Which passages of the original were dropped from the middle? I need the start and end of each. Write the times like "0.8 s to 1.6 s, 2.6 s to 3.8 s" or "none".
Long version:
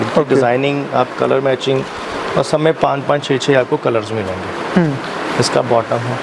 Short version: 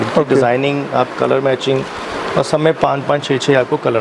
none